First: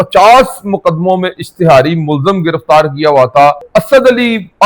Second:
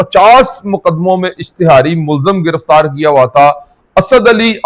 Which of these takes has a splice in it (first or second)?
first